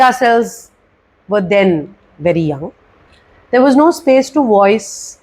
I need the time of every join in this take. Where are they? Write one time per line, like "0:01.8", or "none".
0:03.1